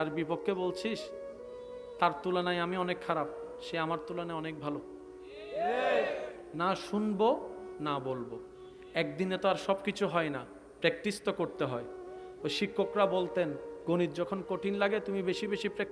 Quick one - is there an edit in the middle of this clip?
no; 0 cuts

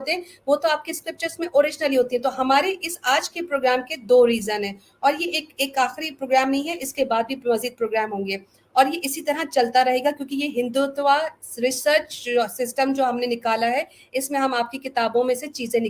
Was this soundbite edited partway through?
no; 0 cuts

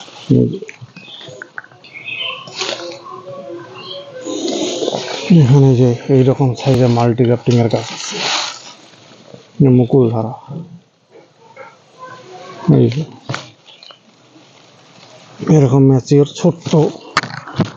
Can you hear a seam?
yes; 1 cut; at 1.7 s

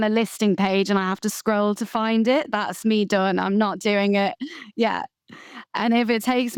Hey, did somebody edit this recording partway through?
no; 0 cuts

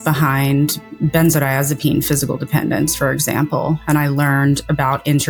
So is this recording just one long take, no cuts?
yes; 0 cuts

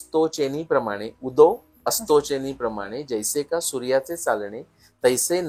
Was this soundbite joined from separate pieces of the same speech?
no; 0 cuts

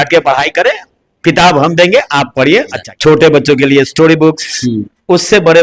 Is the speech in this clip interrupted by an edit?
yes; 1 cut; at 2.8 s

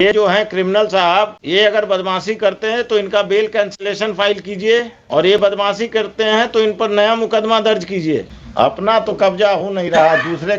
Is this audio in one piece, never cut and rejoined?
no; 3 cuts; at 1.4 s, 5.0 s, 8.4 s

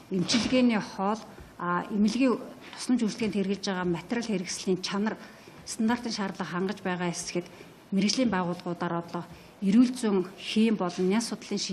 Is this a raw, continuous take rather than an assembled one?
no; 1 cut; at 4.9 s

